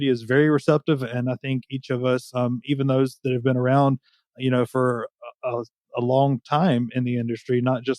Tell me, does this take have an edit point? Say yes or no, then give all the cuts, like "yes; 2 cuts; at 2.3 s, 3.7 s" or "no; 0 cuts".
no; 0 cuts